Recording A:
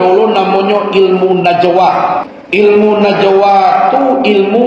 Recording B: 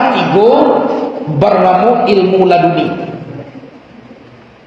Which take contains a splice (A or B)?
A